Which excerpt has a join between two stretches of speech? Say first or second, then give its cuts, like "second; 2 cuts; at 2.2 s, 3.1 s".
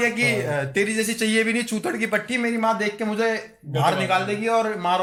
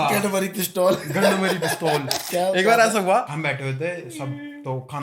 second; 2 cuts; at 2.2 s, 3.3 s